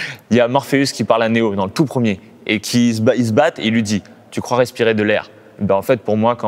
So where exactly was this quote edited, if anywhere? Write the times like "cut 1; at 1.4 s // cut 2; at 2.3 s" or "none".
none